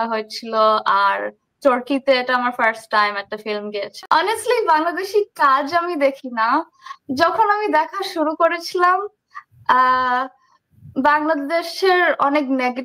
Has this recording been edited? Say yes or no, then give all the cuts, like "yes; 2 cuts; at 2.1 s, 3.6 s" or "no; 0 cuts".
yes; 1 cut; at 3.9 s